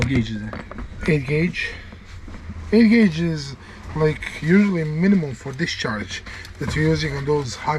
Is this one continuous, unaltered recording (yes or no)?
yes